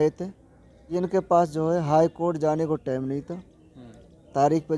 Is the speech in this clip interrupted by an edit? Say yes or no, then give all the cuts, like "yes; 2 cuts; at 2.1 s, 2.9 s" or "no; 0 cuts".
yes; 1 cut; at 1.0 s